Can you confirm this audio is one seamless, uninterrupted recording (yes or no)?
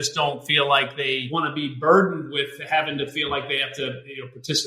no